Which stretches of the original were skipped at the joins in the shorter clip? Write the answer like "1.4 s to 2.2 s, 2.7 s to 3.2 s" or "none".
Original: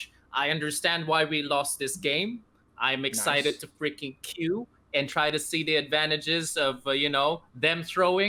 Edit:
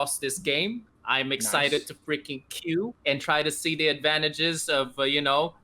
2.5 s to 2.6 s, 4.7 s to 4.8 s